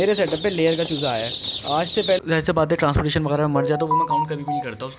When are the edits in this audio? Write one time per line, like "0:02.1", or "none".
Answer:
0:02.2